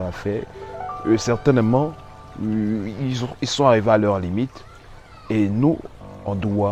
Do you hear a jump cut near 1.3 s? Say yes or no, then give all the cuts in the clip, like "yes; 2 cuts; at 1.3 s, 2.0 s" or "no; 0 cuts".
no; 0 cuts